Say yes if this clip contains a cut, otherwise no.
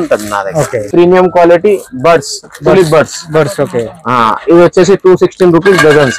no